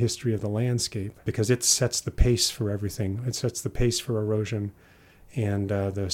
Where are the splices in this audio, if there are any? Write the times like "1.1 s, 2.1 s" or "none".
1.2 s